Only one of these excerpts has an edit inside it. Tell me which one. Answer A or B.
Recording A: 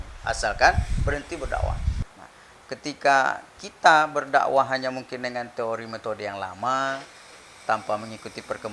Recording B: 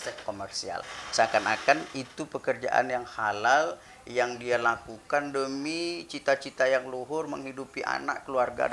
A